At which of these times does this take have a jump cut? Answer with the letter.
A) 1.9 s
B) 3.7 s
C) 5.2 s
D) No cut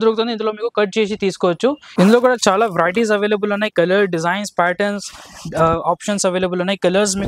A